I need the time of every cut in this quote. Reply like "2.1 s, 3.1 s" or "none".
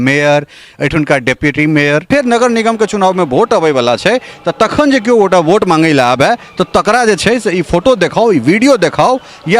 2.1 s